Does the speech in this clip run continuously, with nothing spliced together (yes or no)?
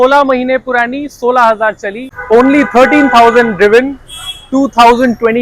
no